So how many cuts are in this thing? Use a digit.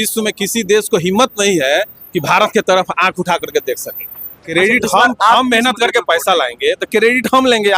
1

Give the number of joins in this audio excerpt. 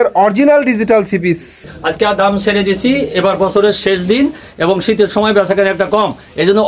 1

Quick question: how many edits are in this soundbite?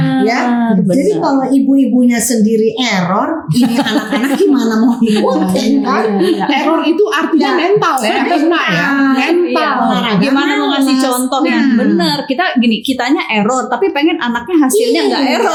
0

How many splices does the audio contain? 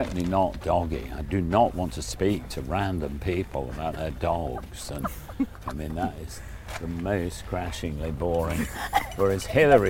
1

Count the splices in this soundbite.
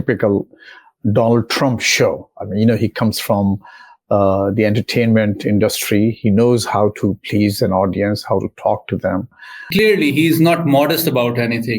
1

